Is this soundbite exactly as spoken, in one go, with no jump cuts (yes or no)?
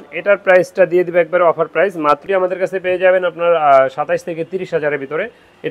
no